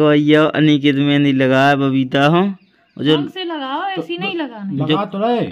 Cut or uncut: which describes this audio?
uncut